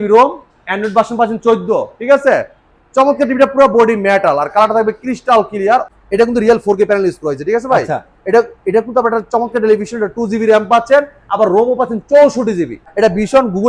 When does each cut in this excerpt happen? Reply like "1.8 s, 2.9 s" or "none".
5.9 s, 12.8 s